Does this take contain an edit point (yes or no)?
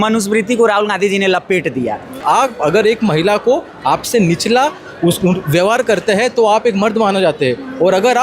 yes